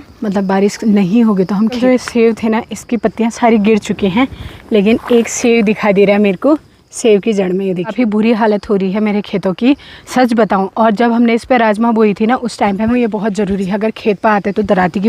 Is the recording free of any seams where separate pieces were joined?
no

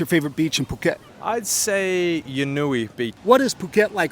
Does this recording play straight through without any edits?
no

